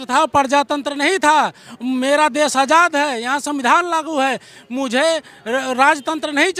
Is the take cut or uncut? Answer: uncut